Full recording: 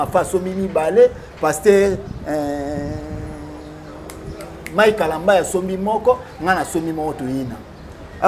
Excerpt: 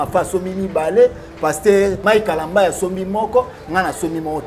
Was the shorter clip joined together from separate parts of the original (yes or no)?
yes